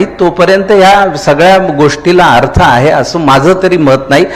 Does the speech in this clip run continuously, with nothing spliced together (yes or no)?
yes